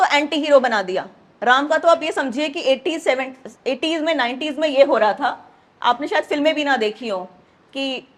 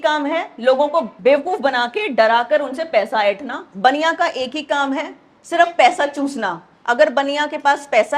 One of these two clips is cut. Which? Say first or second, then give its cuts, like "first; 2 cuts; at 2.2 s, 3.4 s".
second; 1 cut; at 1.1 s